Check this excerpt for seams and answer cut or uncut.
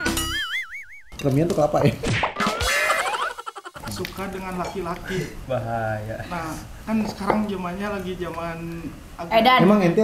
cut